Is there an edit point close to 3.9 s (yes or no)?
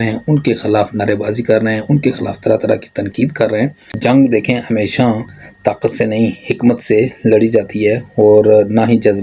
yes